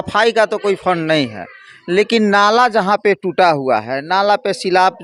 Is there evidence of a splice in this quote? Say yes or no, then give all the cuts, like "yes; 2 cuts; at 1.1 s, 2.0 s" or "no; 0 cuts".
no; 0 cuts